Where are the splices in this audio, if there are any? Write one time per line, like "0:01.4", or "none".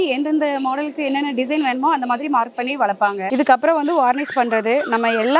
0:03.2